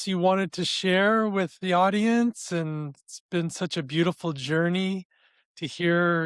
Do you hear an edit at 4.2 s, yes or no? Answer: no